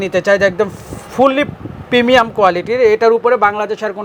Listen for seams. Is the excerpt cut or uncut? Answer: uncut